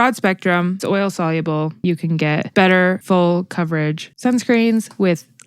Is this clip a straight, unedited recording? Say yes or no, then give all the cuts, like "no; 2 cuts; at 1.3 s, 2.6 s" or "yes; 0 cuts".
no; 3 cuts; at 0.8 s, 1.9 s, 3.0 s